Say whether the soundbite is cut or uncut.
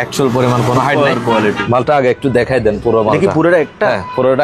cut